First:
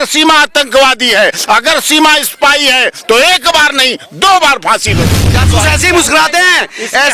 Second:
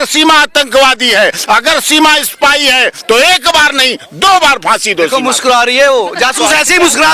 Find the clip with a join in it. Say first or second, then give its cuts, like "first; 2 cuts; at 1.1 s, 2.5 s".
first; 1 cut; at 5.2 s